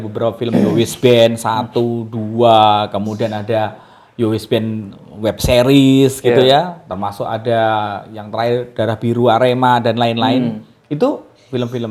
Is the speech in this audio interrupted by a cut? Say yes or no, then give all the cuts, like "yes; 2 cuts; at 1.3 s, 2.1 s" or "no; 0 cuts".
no; 0 cuts